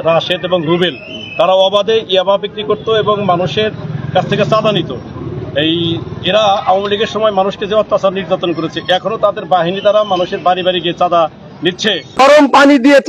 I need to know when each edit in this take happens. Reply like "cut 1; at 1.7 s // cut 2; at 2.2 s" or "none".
cut 1; at 12.2 s